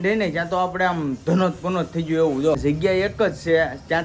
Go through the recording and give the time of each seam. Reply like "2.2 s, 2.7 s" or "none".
2.6 s